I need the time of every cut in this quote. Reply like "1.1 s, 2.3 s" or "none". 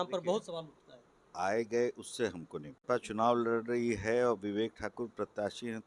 2.8 s